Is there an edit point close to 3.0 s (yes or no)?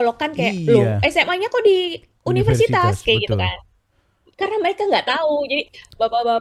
no